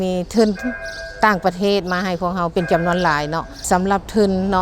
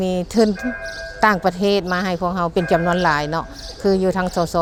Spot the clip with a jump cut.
first; 1 cut; at 3.5 s

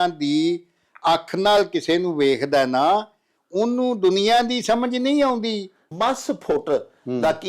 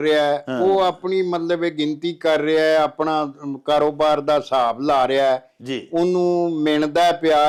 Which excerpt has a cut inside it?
first; 1 cut; at 5.9 s

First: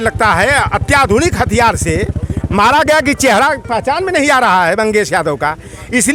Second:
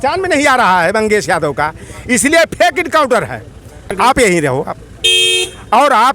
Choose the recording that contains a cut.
second; 1 cut; at 3.9 s

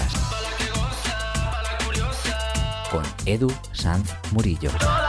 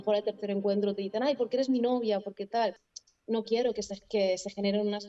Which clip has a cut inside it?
second; 1 cut; at 2.9 s

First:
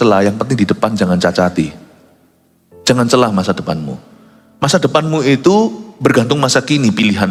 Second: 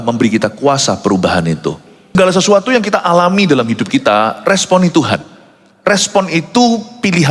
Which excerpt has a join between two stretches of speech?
second; 1 cut; at 2.2 s

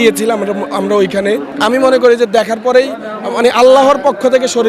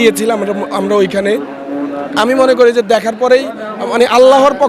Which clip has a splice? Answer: first; 1 cut; at 1.5 s

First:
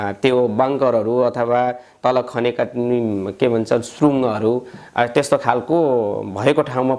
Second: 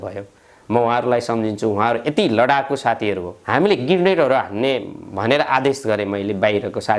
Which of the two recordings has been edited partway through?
second; 1 cut; at 3.3 s

